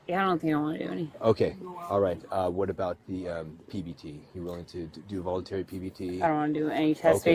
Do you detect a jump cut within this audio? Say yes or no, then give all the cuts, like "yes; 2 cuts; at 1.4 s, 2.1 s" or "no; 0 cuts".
no; 0 cuts